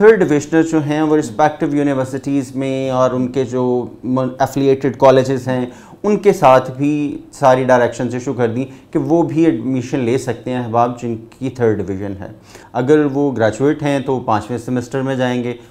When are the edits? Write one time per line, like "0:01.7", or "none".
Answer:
0:12.6